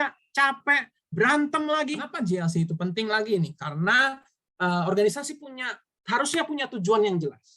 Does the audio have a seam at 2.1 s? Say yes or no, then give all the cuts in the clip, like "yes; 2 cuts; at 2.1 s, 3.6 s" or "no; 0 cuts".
yes; 1 cut; at 2.1 s